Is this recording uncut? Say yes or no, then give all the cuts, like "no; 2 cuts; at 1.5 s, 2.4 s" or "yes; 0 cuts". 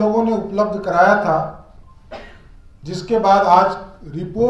yes; 0 cuts